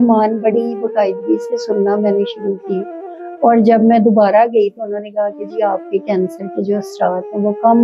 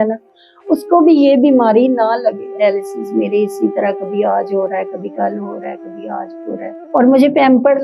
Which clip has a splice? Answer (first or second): second